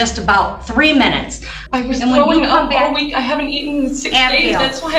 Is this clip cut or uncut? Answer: cut